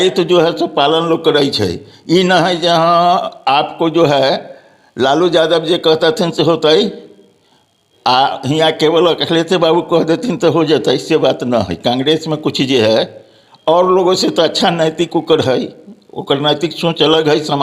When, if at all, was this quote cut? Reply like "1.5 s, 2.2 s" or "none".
none